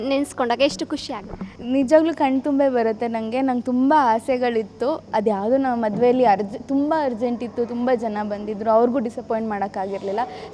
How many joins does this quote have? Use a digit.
0